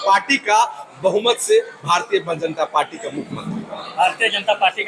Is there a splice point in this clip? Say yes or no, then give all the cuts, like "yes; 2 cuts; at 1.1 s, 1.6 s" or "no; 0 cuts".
no; 0 cuts